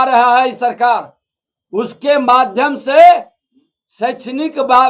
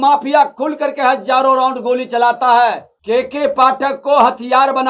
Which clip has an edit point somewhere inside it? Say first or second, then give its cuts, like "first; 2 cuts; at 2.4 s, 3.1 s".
second; 1 cut; at 2.9 s